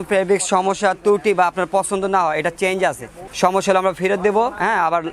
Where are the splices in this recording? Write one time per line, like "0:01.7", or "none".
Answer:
0:03.2